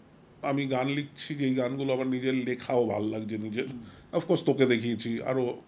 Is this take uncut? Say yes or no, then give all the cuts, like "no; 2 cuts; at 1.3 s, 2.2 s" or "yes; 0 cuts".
yes; 0 cuts